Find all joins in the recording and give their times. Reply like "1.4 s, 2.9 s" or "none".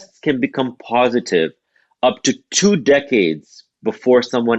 none